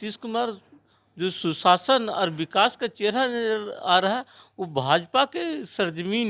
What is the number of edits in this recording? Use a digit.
0